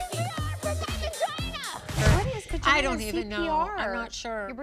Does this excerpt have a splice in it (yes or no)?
yes